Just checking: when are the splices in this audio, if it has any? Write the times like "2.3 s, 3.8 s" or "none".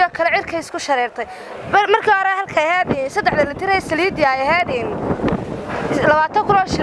none

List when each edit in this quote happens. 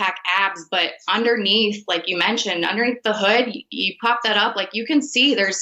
none

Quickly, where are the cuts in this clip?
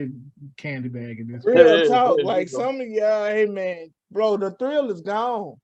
4.0 s

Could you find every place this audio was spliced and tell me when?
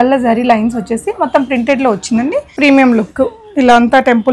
2.5 s

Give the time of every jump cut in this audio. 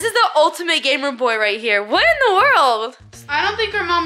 none

